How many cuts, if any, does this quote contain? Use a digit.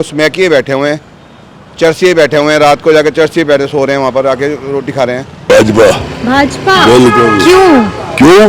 1